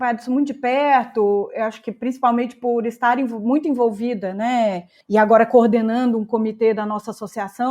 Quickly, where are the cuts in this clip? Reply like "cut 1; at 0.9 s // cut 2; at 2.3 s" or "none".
cut 1; at 4.9 s